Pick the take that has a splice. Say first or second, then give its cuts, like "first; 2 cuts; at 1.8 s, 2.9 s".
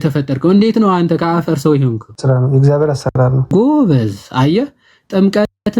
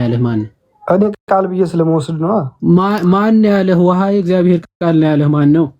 first; 2 cuts; at 2.1 s, 3.5 s